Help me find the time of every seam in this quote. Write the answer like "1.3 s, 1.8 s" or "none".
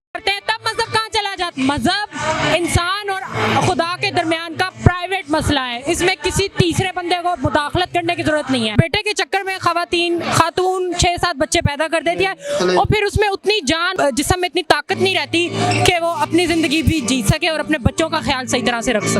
1.5 s, 8.7 s, 13.9 s